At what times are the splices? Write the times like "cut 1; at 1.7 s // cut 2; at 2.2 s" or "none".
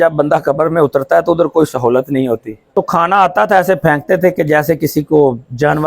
cut 1; at 2.6 s